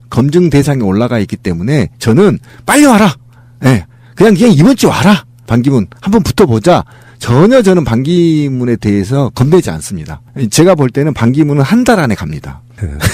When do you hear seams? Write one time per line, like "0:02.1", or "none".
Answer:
none